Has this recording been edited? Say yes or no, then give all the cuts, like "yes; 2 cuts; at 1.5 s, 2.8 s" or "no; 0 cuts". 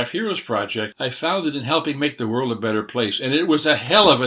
yes; 1 cut; at 0.9 s